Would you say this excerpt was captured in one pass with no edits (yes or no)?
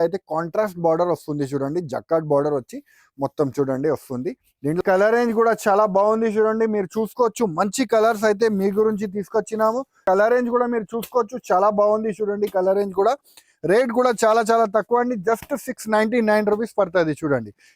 no